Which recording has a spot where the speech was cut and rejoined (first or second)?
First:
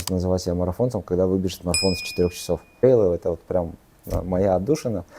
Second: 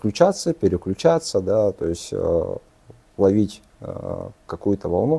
first